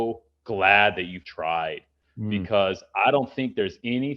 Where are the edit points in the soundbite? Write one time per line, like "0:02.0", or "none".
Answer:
0:01.3